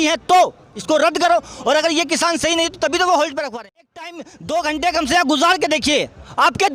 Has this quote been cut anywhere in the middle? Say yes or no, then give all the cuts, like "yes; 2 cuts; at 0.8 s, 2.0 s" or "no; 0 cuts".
yes; 1 cut; at 3.7 s